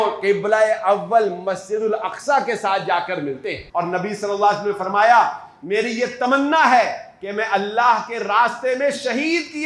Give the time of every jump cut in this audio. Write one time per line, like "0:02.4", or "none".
0:03.5